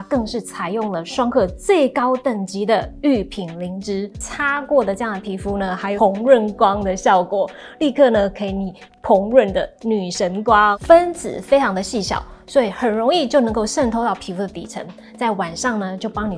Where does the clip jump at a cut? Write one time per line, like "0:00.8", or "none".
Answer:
0:04.3
0:06.0
0:10.8